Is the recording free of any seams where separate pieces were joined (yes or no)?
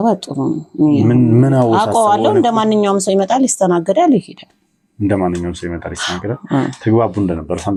yes